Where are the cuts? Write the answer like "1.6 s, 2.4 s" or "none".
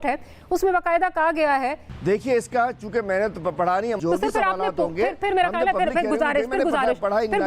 1.9 s, 4.0 s